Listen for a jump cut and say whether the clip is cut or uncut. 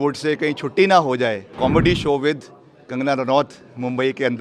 cut